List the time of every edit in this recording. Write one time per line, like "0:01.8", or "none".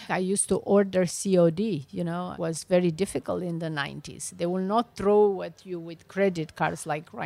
none